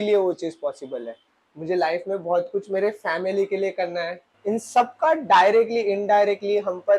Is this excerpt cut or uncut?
cut